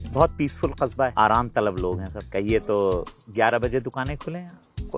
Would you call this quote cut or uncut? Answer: cut